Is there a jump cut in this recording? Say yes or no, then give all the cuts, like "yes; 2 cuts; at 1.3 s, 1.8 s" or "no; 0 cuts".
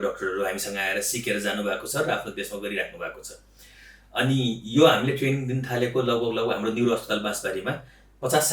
no; 0 cuts